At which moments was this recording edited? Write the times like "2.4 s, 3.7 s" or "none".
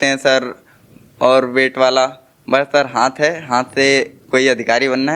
none